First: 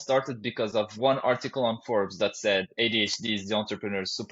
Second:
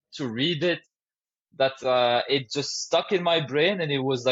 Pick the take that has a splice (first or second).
first